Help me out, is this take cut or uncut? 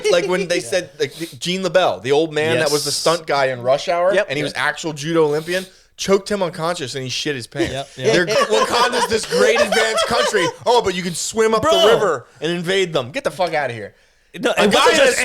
cut